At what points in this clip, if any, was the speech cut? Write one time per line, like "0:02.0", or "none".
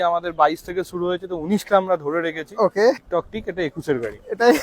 0:03.0